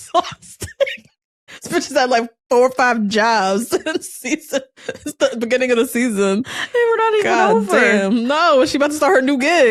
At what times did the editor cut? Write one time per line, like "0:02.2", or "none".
none